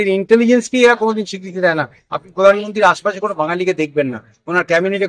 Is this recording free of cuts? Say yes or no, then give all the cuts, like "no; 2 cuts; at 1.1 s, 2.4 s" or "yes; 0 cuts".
yes; 0 cuts